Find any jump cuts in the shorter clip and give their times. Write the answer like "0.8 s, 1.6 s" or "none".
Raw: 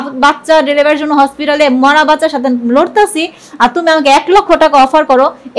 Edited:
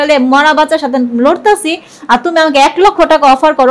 none